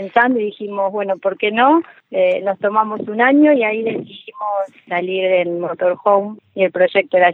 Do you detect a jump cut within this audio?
yes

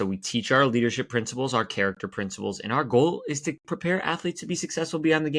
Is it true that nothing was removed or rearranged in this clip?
yes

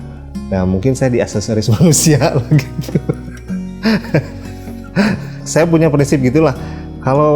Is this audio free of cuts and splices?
no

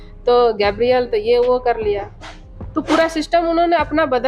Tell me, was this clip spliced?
no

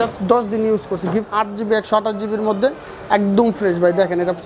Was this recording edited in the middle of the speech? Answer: yes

